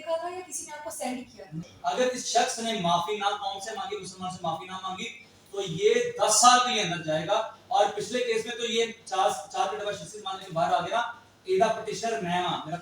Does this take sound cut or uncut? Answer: cut